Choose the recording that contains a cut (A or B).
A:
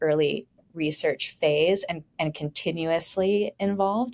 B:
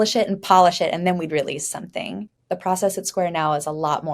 B